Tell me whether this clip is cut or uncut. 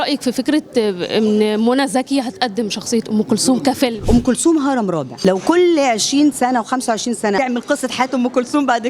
cut